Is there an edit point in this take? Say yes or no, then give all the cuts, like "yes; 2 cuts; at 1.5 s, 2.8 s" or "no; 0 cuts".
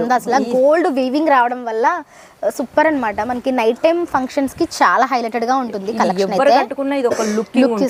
no; 0 cuts